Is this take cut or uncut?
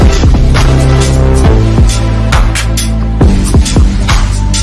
uncut